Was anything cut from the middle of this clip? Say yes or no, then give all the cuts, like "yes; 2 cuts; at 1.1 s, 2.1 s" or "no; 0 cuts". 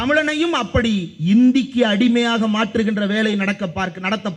no; 0 cuts